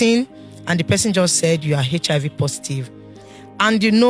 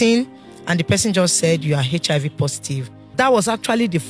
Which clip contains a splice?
second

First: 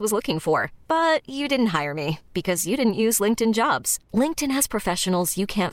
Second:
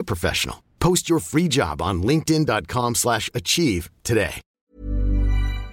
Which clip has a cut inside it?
second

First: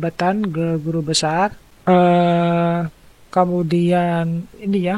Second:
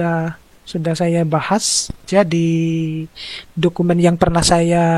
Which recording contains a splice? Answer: first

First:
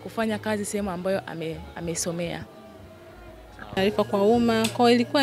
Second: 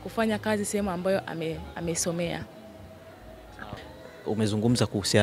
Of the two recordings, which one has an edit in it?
first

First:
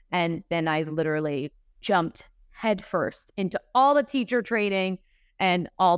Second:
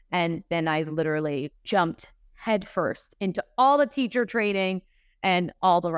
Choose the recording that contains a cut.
second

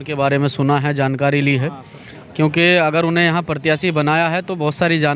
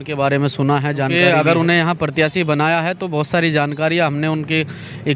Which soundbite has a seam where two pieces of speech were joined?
second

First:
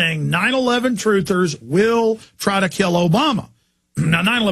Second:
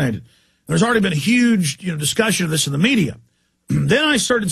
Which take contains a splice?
second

